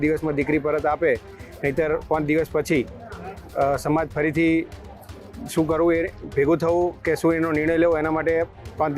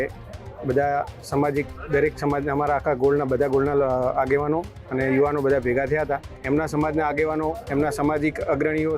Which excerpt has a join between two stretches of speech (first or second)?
second